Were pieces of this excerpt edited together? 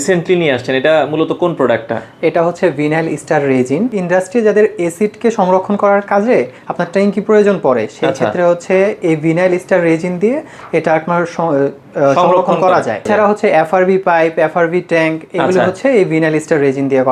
yes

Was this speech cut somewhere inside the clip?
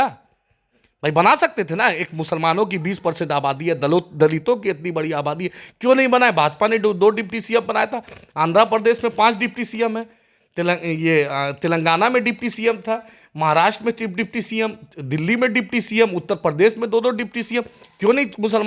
no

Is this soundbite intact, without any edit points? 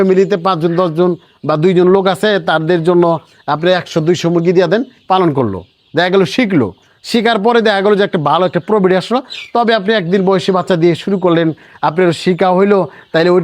yes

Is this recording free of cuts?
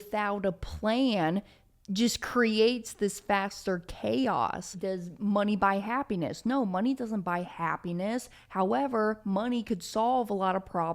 no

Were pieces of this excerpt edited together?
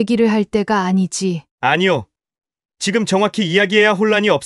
no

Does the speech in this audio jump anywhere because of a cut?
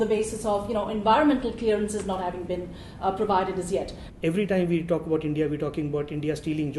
yes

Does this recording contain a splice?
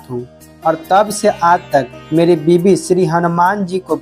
yes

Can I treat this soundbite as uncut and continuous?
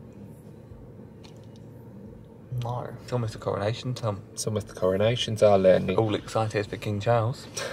no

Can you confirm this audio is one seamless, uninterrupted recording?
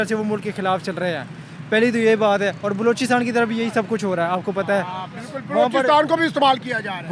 yes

